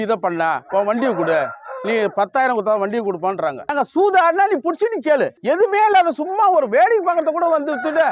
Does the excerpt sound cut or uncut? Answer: cut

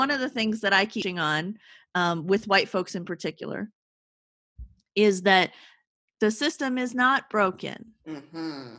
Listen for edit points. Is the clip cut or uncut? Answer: cut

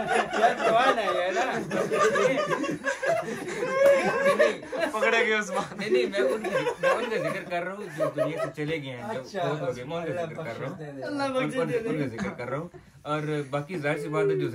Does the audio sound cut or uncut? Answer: uncut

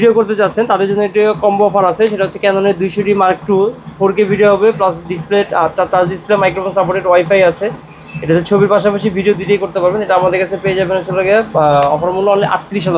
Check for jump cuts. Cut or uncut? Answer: uncut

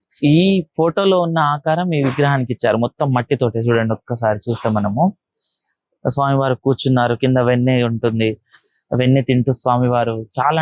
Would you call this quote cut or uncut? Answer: uncut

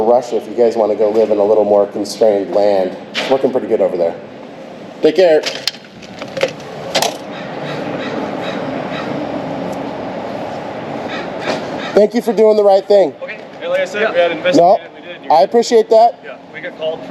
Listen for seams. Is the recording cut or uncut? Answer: uncut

